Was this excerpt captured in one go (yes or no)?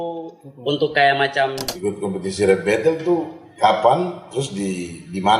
no